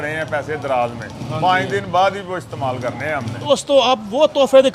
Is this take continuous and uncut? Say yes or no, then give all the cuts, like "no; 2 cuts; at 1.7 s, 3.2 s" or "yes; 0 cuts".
no; 1 cut; at 3.3 s